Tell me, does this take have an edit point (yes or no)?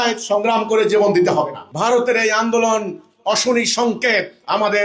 yes